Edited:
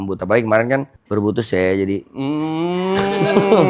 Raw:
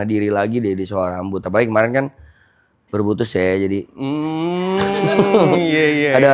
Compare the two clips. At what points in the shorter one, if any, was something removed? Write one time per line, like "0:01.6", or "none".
0:01.0